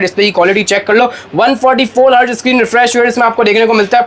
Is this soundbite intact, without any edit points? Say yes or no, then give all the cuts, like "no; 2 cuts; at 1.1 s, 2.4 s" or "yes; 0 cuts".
yes; 0 cuts